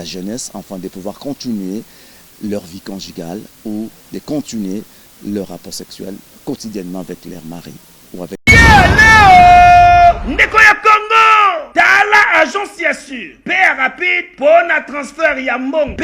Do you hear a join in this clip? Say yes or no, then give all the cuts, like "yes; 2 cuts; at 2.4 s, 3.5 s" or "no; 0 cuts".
yes; 1 cut; at 8.4 s